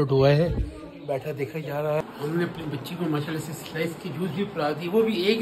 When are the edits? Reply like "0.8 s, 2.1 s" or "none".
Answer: 2.0 s

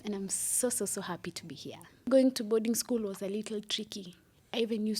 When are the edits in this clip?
2.1 s

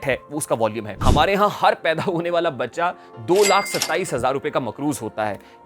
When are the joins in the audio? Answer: 1.0 s

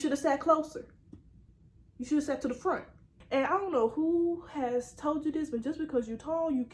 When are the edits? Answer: 3.1 s

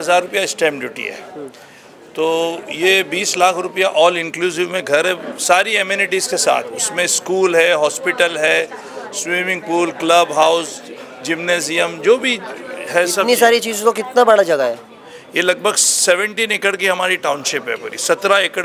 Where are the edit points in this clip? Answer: none

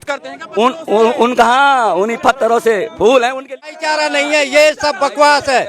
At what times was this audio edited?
3.7 s

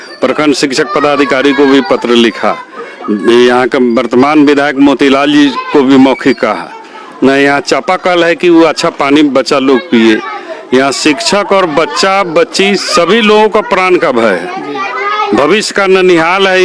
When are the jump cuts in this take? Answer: none

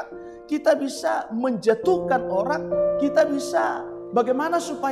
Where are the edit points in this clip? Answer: 3.9 s

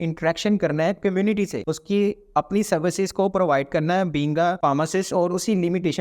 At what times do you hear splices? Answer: 1.7 s, 4.6 s

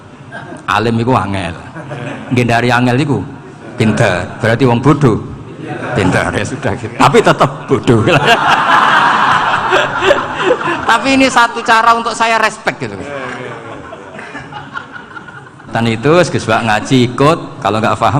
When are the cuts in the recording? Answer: 15.7 s

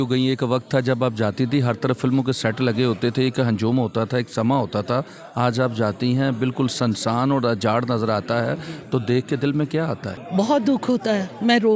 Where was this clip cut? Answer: none

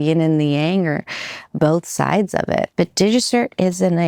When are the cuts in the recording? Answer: 2.7 s

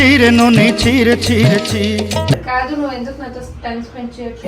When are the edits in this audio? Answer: 2.4 s

